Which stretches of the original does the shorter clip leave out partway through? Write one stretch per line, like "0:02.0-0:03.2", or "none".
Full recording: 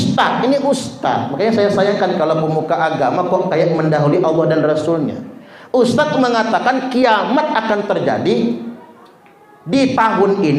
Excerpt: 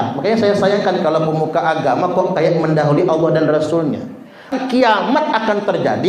0:05.7-0:06.8